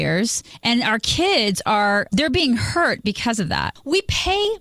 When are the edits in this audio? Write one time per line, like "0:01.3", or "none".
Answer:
0:03.7